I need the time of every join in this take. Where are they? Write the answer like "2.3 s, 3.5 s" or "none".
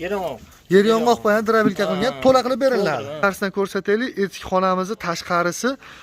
3.2 s